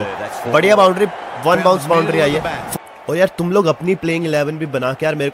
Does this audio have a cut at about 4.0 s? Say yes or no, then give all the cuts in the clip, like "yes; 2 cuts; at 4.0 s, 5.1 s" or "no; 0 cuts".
no; 1 cut; at 2.6 s